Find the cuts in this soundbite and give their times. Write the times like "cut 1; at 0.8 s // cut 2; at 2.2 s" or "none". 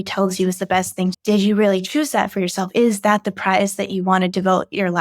cut 1; at 1.2 s

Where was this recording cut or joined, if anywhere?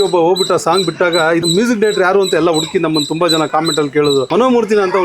cut 1; at 1.5 s // cut 2; at 4.3 s

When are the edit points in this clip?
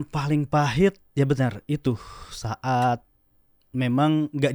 none

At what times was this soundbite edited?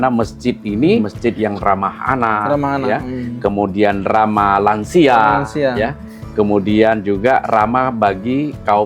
cut 1; at 1.1 s

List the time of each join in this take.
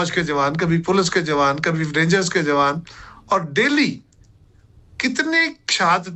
none

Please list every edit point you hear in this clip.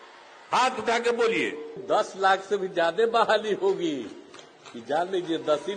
cut 1; at 1.8 s

